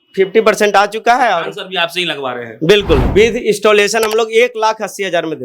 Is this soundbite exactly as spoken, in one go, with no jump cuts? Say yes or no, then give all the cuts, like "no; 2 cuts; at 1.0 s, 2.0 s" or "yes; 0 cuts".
no; 1 cut; at 3.1 s